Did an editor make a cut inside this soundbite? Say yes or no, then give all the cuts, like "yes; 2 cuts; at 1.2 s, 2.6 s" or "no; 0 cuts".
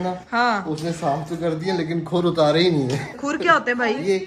yes; 1 cut; at 3.2 s